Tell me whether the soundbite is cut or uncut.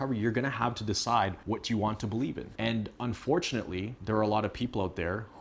cut